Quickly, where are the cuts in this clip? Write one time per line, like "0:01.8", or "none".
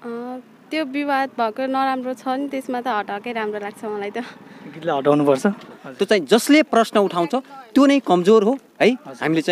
0:05.8